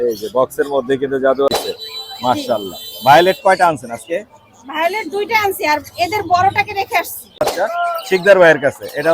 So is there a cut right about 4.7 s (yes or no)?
no